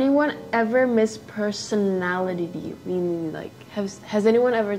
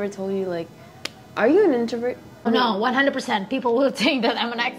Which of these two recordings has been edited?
second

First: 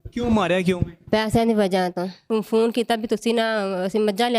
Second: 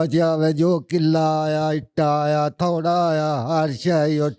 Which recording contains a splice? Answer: first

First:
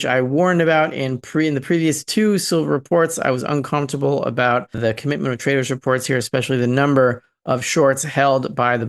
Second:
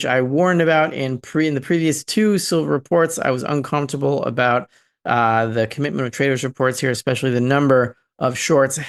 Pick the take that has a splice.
first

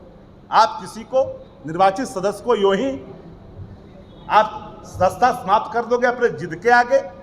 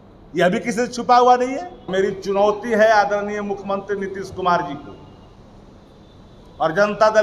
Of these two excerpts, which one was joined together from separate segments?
second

